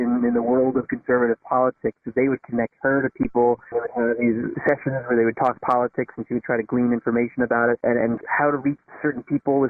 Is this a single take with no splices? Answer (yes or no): no